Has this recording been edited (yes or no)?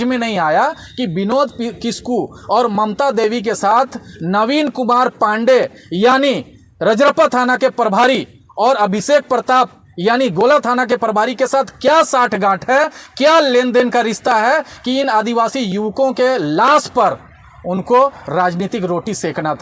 no